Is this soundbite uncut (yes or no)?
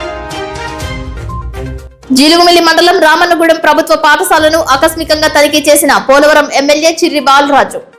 no